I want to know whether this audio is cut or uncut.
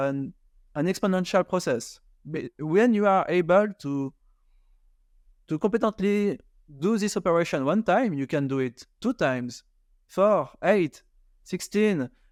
uncut